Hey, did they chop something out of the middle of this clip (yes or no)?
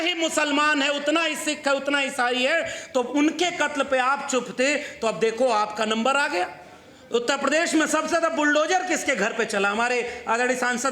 no